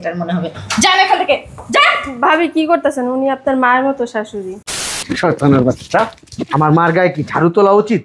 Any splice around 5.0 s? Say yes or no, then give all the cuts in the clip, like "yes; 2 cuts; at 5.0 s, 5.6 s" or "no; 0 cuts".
yes; 1 cut; at 5.0 s